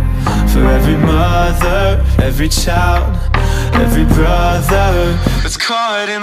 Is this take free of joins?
yes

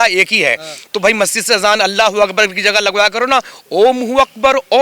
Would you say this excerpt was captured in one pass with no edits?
yes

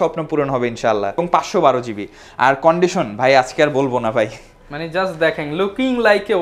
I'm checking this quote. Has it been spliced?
yes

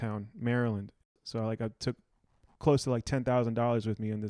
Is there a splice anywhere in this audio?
yes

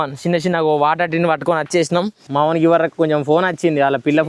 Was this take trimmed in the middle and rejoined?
yes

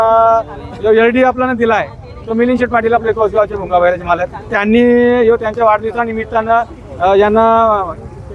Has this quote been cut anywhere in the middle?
no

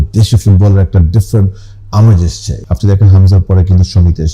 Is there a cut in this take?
yes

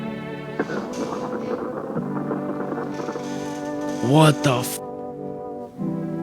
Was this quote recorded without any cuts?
yes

